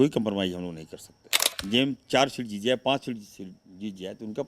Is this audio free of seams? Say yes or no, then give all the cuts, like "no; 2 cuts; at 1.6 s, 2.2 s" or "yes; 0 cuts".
no; 1 cut; at 1.5 s